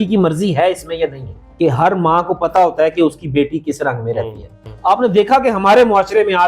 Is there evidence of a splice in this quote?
yes; 2 cuts; at 1.3 s, 4.7 s

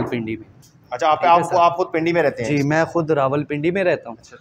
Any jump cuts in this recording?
no; 0 cuts

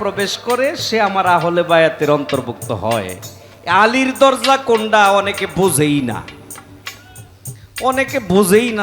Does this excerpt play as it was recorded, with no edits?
yes; 0 cuts

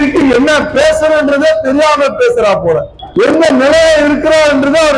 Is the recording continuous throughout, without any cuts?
no; 1 cut; at 3.0 s

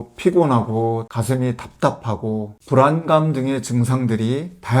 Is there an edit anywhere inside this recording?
no; 0 cuts

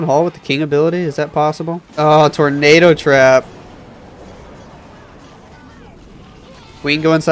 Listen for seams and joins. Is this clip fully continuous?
no; 1 cut; at 1.8 s

